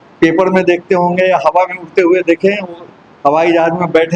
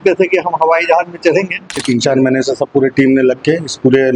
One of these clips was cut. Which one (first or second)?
second